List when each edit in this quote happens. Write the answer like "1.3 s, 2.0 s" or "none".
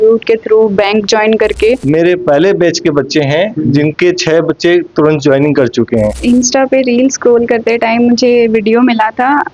1.8 s, 6.2 s